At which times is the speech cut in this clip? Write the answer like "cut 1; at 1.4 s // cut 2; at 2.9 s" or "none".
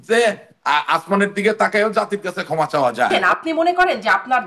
cut 1; at 3.1 s